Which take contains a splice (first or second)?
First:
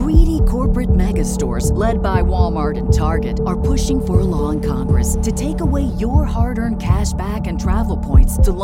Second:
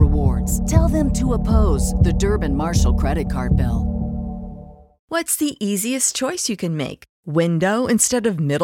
second